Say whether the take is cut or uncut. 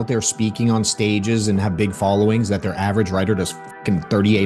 uncut